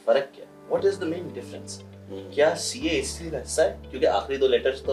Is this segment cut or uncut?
uncut